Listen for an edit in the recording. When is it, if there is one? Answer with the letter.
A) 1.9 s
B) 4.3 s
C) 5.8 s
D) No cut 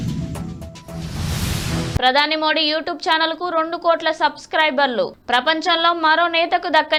D